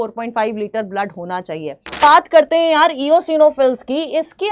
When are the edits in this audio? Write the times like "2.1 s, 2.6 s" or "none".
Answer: 2.0 s